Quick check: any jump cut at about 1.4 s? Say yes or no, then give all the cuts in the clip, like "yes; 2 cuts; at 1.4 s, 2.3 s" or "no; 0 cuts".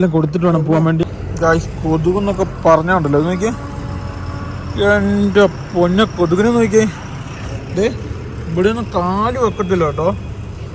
yes; 1 cut; at 1.4 s